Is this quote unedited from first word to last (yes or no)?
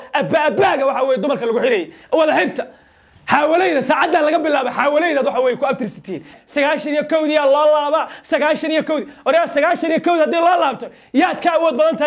no